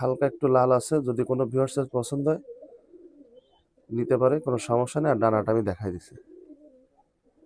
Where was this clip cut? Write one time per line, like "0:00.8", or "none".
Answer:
none